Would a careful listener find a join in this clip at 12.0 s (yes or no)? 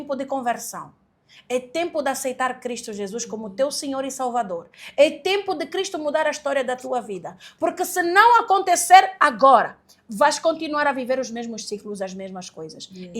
no